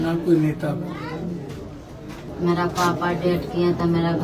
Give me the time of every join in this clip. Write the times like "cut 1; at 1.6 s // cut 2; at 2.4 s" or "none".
cut 1; at 2.2 s